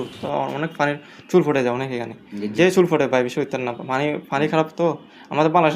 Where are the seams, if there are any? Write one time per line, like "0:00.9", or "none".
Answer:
0:02.5